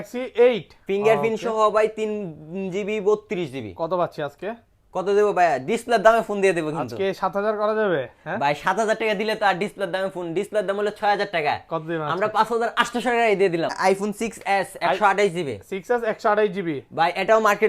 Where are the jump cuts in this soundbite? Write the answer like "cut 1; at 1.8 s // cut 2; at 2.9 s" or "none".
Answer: cut 1; at 13.7 s